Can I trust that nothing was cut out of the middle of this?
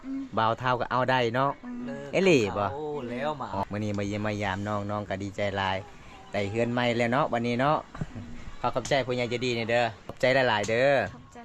no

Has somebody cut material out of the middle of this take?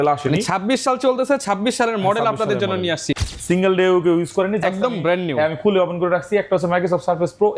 yes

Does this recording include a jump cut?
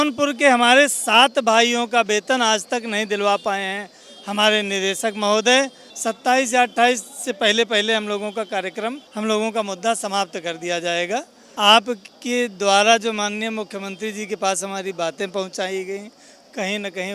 yes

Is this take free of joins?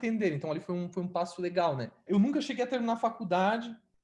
no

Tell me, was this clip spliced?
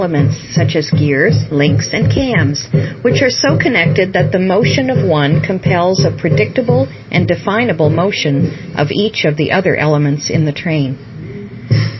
no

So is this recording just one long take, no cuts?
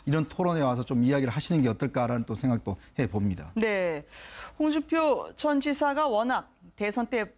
no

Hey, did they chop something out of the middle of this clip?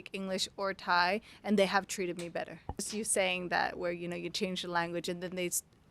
yes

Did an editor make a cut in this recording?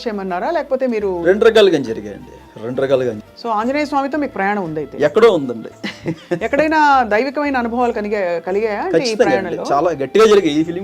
yes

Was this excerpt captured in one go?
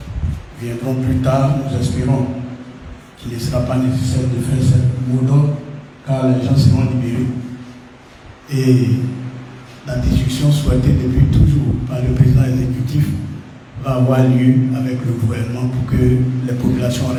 yes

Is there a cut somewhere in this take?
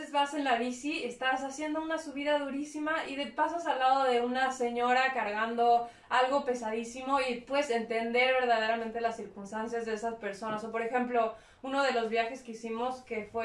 no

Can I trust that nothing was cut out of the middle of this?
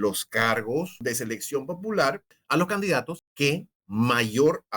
no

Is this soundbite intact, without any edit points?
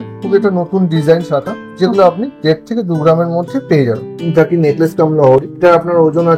no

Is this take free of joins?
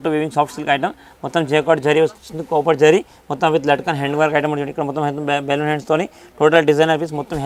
yes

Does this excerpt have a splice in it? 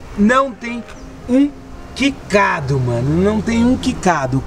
no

